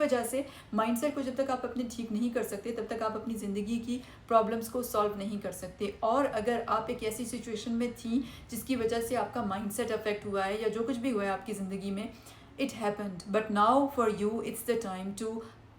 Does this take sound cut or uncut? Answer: uncut